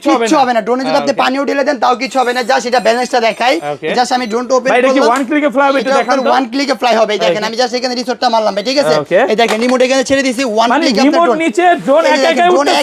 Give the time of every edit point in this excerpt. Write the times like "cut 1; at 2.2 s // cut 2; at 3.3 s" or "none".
none